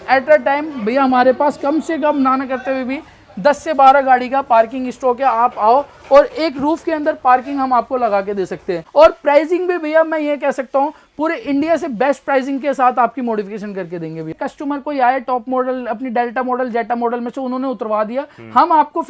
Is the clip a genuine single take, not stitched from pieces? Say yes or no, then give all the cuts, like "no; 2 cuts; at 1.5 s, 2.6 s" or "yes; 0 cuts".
no; 2 cuts; at 8.8 s, 14.3 s